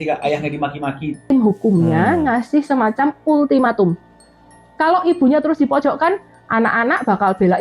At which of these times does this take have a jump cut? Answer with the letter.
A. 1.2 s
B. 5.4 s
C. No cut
A